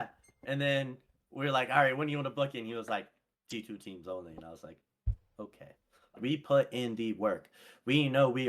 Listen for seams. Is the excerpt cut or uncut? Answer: cut